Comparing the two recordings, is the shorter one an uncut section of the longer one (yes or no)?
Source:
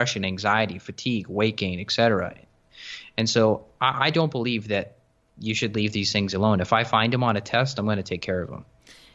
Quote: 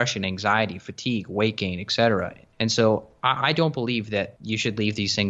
no